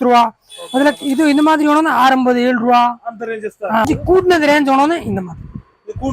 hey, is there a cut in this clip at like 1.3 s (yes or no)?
no